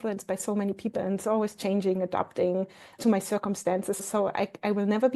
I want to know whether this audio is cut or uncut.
cut